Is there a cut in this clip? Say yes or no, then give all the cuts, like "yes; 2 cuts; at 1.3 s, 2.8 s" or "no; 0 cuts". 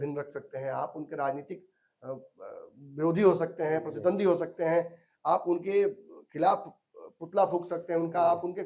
no; 0 cuts